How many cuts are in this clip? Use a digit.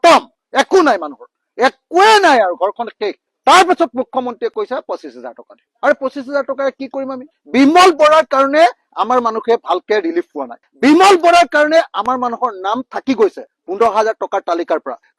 1